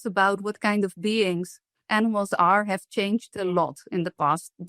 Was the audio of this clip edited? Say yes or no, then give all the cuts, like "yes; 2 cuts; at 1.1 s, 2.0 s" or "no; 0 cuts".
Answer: no; 0 cuts